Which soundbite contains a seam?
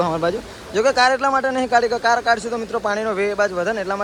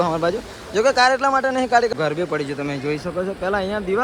second; 1 cut; at 1.9 s

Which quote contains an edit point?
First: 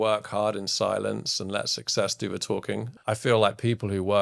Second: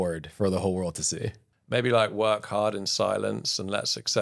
first; 1 cut; at 2.9 s

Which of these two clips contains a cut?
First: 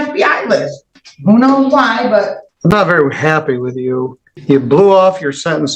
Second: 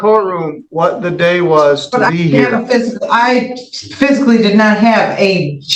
first; 2 cuts; at 2.4 s, 4.2 s

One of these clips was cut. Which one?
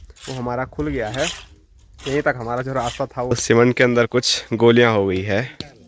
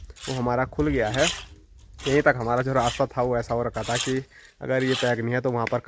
first; 1 cut; at 3.3 s

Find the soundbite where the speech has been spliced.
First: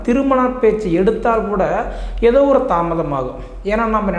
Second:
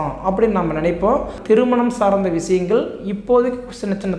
second; 1 cut; at 1.4 s

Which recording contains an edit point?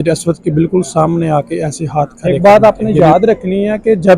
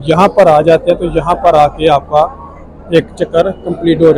first; 1 cut; at 2.2 s

